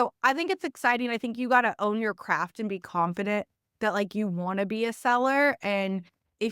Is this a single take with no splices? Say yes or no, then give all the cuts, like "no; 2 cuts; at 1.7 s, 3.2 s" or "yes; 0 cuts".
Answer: yes; 0 cuts